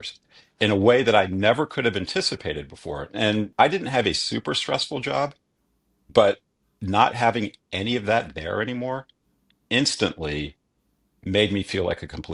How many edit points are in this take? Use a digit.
1